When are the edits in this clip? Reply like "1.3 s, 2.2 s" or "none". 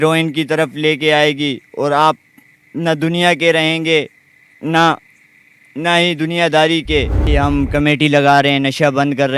7.3 s